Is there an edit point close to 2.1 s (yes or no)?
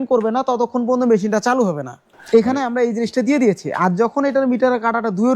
yes